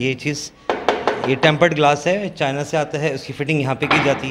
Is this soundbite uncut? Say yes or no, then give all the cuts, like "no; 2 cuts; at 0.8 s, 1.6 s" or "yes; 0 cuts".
yes; 0 cuts